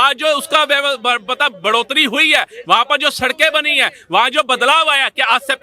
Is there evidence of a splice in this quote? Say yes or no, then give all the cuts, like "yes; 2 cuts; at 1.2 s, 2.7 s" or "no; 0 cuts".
no; 0 cuts